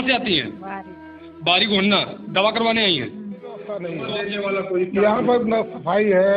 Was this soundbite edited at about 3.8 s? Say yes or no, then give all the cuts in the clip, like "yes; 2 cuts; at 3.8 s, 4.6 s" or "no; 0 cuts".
yes; 1 cut; at 3.8 s